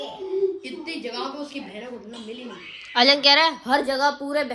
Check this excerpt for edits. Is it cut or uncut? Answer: uncut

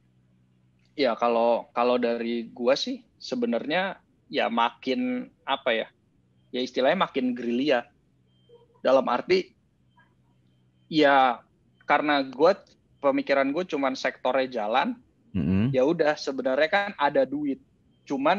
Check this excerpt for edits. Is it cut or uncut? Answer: uncut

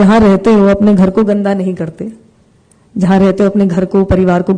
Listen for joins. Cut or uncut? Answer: uncut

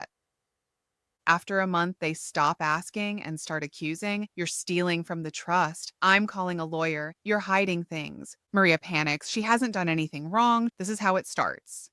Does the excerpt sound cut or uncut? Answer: cut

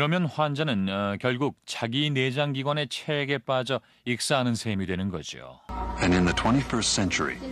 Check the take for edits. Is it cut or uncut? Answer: cut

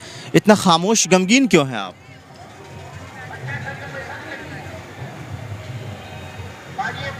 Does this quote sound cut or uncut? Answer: uncut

